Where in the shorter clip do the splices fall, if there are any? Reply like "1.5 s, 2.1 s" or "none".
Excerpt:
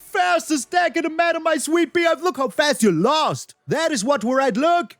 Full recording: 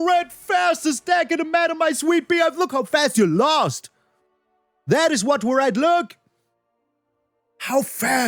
3.5 s